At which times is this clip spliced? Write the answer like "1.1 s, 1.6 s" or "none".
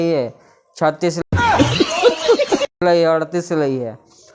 1.2 s, 2.8 s